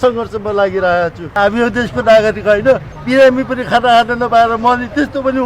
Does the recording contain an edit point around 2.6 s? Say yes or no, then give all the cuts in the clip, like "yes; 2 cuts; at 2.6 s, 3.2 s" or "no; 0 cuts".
no; 1 cut; at 1.2 s